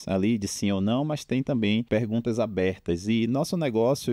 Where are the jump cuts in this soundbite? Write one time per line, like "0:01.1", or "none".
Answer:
0:01.8